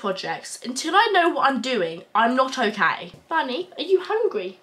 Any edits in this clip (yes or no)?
yes